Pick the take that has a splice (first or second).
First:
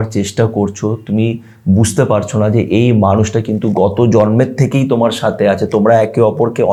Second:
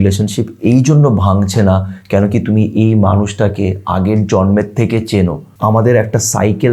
second